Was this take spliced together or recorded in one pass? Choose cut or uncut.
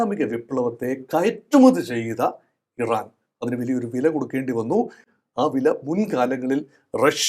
uncut